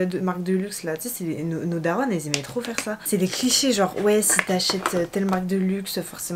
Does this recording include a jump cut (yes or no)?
no